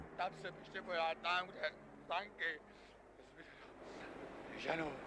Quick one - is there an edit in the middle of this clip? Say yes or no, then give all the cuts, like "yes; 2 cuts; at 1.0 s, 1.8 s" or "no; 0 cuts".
yes; 1 cut; at 1.5 s